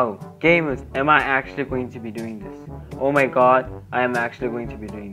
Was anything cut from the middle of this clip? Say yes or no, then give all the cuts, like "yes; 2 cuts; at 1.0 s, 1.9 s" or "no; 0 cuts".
no; 0 cuts